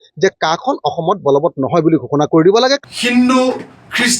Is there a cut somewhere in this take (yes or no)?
yes